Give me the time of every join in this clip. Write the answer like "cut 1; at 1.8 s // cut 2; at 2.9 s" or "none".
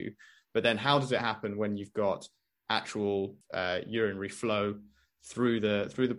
cut 1; at 3.4 s